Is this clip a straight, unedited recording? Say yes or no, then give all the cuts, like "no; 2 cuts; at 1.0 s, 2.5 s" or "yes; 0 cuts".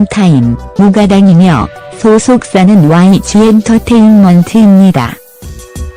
yes; 0 cuts